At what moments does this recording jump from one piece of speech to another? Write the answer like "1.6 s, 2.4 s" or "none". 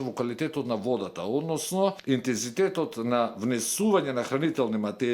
2.0 s